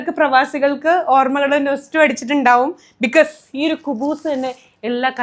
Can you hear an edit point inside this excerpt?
no; 0 cuts

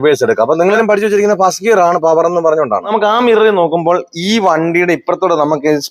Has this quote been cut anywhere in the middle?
yes; 2 cuts; at 0.7 s, 2.8 s

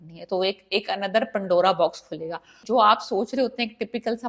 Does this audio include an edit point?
yes; 1 cut; at 2.5 s

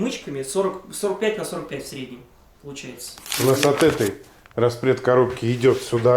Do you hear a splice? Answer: yes; 1 cut; at 3.3 s

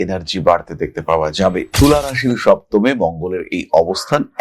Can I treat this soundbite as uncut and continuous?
no; 1 cut; at 1.8 s

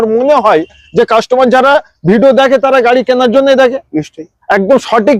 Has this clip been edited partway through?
no; 0 cuts

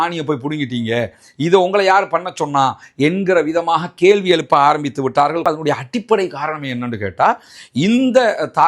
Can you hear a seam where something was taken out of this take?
no; 0 cuts

